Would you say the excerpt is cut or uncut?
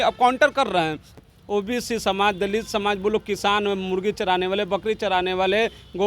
cut